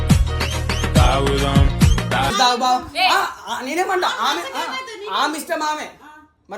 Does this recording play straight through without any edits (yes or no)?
no